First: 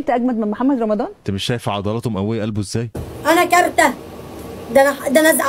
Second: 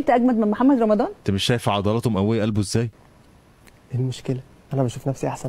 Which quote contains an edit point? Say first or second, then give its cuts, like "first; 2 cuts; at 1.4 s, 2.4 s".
first; 1 cut; at 3.0 s